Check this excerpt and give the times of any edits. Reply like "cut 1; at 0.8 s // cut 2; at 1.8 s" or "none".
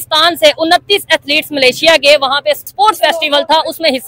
cut 1; at 2.6 s